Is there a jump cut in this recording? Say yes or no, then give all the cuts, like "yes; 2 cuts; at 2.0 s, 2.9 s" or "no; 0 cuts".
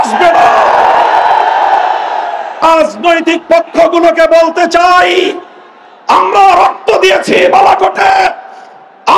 yes; 1 cut; at 2.6 s